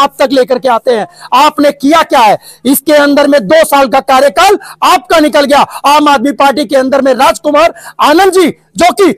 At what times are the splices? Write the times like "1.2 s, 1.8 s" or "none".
none